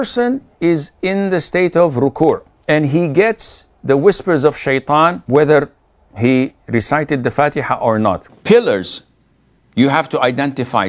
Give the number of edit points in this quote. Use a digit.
3